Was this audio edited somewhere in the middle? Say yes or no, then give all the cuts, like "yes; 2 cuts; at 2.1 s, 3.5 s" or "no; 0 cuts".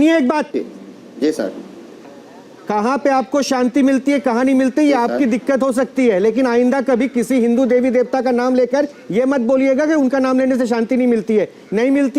no; 0 cuts